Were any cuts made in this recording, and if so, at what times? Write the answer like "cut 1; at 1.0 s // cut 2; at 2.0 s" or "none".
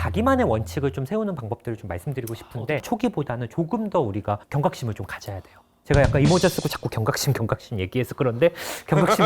cut 1; at 2.8 s // cut 2; at 4.5 s